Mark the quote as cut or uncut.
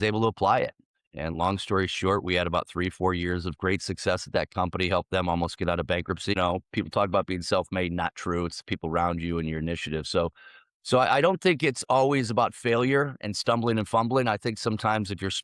cut